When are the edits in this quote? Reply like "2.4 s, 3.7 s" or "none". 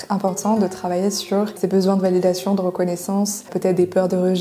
1.5 s, 3.5 s